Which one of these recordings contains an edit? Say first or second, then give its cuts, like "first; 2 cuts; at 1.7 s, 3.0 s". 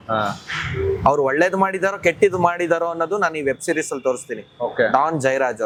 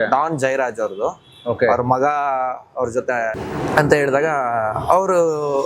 second; 1 cut; at 3.4 s